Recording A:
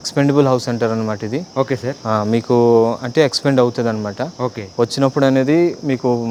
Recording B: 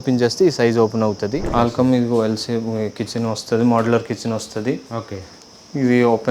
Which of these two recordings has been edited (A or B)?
B